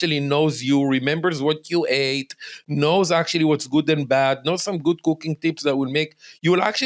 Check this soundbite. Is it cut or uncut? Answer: uncut